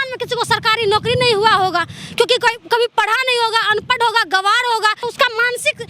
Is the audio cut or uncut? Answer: cut